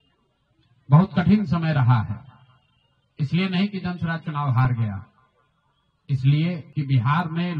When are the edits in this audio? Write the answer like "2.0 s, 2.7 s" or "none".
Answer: 6.7 s